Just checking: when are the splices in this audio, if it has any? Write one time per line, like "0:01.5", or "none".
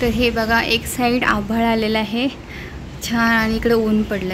none